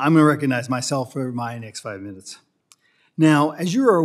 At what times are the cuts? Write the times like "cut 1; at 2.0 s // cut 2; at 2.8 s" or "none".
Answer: none